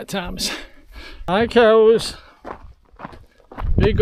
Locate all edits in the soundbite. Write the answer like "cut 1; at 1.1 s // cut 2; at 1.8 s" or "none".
cut 1; at 1.2 s